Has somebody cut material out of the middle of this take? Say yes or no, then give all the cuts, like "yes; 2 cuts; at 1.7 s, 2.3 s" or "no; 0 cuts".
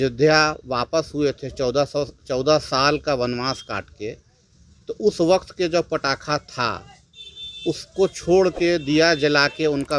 no; 0 cuts